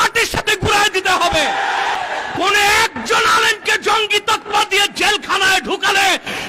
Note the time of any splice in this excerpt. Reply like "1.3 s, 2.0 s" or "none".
2.0 s